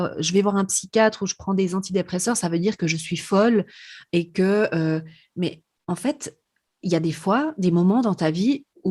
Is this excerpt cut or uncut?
uncut